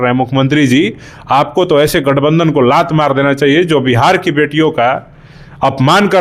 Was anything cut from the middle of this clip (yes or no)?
no